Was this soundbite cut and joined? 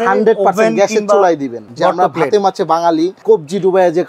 yes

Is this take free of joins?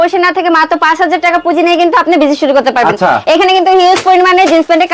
yes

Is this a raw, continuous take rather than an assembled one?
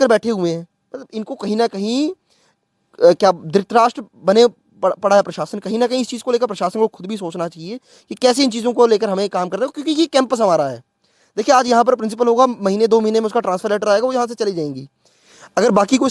yes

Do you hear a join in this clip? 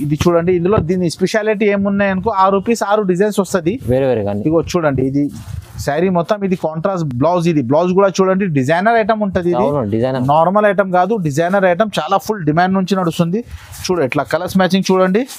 no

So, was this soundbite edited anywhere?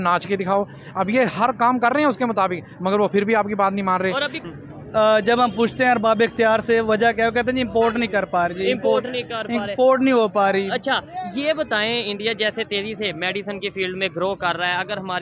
yes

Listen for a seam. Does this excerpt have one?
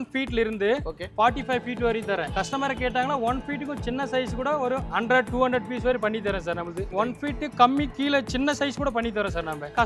no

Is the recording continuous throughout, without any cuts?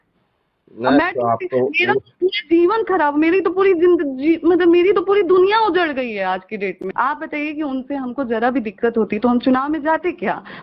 no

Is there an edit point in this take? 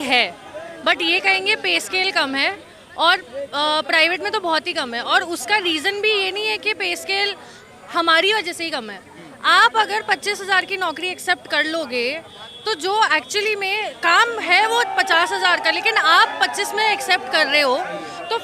no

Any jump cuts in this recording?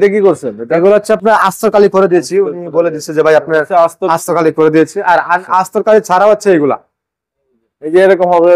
no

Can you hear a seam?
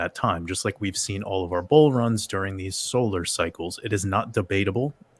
no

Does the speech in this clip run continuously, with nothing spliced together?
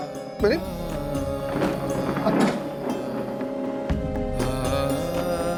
yes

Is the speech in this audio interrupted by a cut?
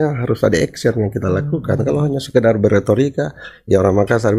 no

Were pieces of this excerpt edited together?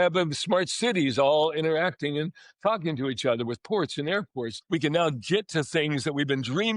yes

